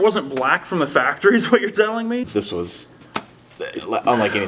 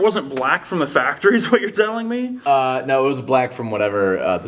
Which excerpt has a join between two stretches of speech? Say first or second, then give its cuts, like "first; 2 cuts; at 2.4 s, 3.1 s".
first; 1 cut; at 2.3 s